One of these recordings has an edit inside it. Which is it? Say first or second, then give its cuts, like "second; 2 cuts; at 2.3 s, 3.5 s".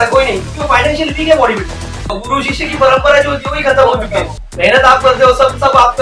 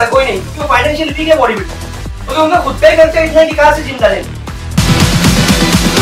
first; 2 cuts; at 2.2 s, 4.4 s